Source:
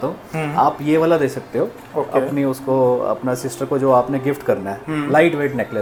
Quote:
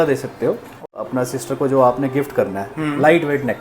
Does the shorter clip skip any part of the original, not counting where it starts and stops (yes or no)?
yes